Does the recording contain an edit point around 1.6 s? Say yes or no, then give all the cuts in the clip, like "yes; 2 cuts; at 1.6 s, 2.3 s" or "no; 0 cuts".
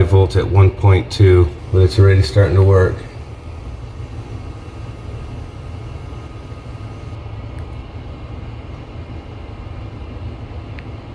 yes; 1 cut; at 1.6 s